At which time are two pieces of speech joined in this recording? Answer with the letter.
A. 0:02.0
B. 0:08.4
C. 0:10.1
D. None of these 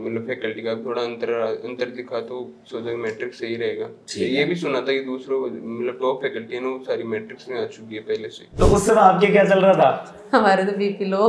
B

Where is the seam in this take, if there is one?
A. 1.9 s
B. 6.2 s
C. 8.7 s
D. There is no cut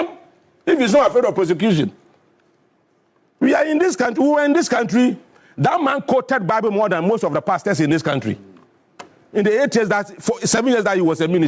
D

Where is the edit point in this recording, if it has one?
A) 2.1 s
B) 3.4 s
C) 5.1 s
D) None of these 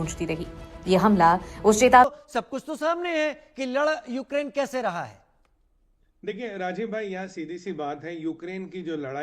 A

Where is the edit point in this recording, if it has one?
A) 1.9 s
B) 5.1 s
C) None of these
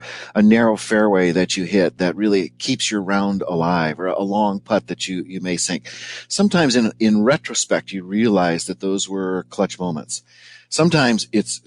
A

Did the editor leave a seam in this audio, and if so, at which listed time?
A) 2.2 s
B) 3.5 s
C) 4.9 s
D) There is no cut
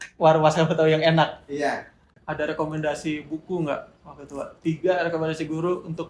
A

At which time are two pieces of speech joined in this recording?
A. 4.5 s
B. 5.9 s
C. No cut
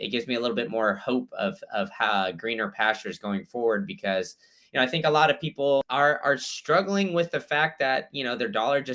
B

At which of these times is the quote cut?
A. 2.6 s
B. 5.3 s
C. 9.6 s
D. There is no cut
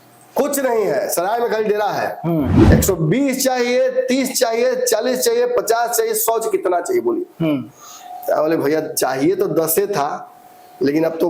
A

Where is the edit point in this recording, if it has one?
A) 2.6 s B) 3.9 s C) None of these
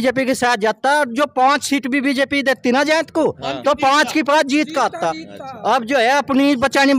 C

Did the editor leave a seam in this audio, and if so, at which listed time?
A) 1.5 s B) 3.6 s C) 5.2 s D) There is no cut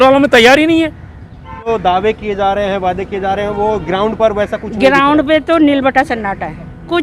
A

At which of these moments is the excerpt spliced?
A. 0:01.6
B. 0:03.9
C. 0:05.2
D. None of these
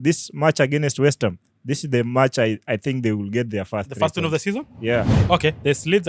C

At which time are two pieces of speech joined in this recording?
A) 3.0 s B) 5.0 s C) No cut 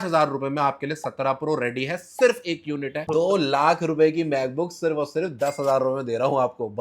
A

